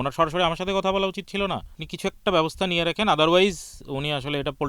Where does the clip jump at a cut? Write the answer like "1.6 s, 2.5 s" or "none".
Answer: 1.8 s